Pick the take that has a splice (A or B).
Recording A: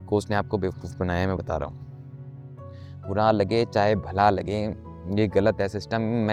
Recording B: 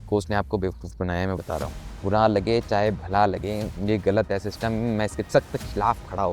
B